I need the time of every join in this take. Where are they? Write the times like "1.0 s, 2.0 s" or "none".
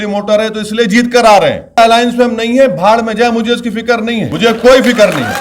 1.8 s, 4.3 s

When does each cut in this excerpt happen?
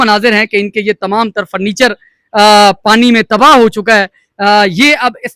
none

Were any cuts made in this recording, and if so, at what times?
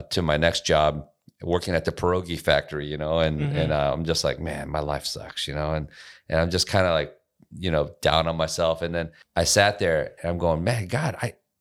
9.2 s

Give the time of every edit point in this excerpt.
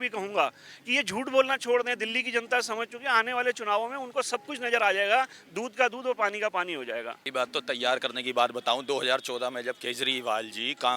7.2 s

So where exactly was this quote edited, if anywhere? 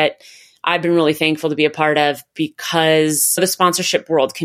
none

